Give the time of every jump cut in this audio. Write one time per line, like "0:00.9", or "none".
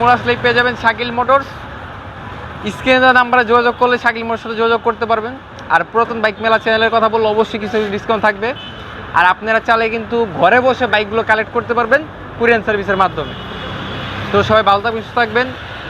none